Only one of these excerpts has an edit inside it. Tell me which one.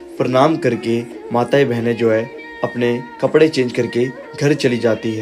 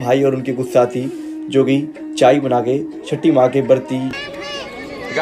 second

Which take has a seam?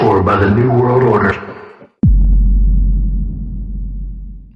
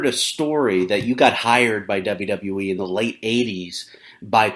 second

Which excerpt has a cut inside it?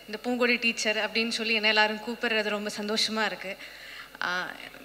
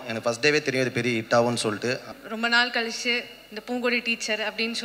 second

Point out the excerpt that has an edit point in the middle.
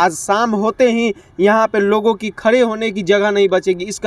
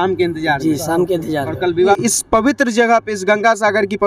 second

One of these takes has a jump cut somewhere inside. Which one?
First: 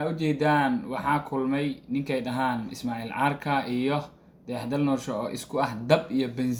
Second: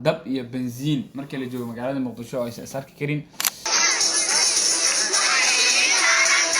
second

